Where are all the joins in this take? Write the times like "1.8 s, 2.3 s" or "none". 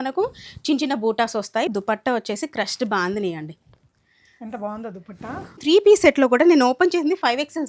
1.7 s, 5.6 s